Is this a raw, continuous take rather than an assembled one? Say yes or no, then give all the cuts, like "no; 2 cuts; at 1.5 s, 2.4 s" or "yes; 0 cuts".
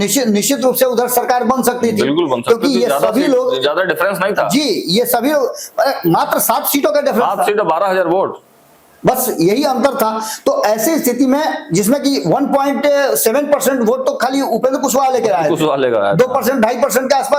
yes; 0 cuts